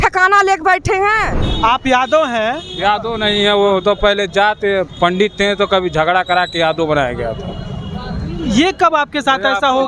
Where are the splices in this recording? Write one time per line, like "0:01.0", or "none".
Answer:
0:01.4